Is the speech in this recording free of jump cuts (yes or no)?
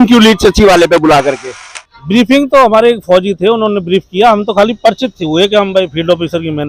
yes